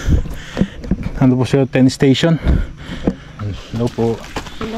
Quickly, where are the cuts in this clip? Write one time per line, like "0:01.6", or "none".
0:03.3